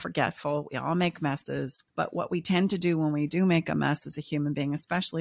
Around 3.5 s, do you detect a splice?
no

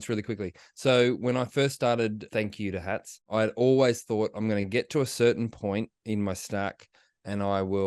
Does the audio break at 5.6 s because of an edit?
no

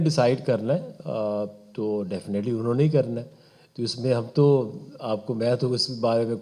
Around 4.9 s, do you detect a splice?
no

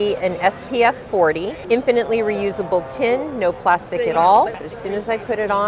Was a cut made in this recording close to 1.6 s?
yes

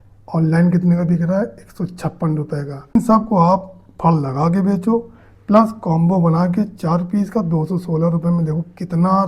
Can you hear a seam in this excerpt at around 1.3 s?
no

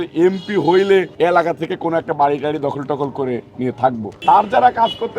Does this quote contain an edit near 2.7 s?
no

